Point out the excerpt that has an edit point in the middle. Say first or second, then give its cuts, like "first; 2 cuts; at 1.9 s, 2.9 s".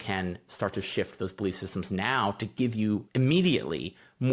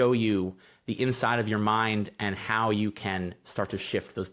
first; 1 cut; at 3.1 s